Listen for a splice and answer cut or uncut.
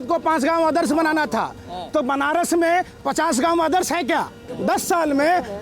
cut